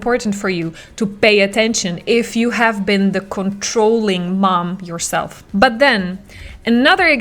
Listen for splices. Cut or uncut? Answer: cut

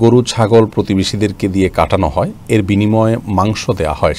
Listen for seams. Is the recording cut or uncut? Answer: uncut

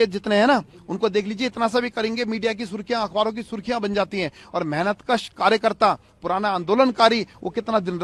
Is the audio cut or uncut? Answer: uncut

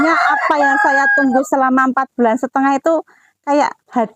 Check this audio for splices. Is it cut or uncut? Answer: uncut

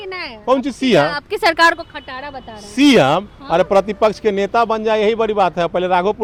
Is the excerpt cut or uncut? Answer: uncut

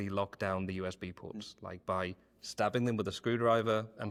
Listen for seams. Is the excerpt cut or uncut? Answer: uncut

